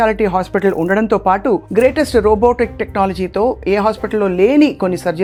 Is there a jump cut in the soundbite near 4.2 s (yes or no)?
no